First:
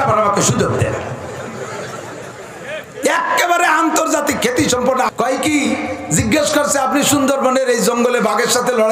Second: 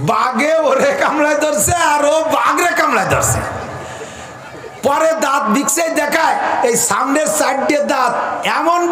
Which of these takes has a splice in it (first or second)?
first